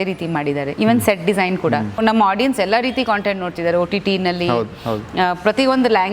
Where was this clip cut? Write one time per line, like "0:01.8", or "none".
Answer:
0:02.0